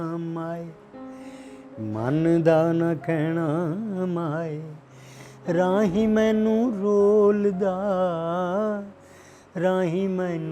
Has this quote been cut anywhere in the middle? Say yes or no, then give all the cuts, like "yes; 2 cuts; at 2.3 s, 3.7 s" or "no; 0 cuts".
no; 0 cuts